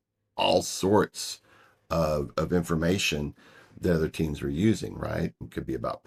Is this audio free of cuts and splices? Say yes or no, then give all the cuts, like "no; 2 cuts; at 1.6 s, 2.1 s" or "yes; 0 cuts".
yes; 0 cuts